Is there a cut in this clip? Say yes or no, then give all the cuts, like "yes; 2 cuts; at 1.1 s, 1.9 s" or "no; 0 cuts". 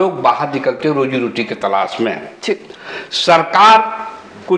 no; 0 cuts